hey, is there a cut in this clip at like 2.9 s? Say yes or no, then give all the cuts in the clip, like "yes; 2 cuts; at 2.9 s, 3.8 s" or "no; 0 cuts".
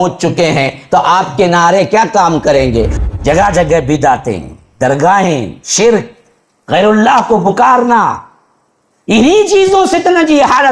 yes; 1 cut; at 2.9 s